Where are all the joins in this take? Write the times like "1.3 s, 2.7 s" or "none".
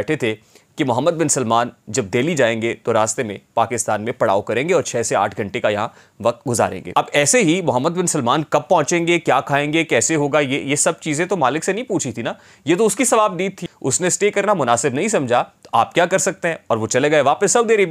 6.8 s, 13.7 s